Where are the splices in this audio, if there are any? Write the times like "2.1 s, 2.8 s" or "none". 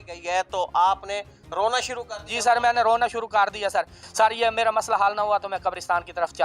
4.0 s